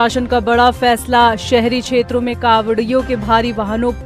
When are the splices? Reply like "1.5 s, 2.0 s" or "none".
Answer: none